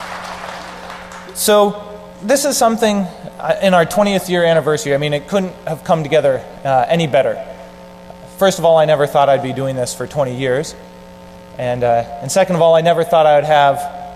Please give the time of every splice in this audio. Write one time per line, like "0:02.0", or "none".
none